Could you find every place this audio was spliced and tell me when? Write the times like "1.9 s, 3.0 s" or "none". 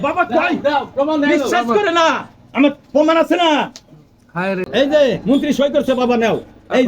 4.6 s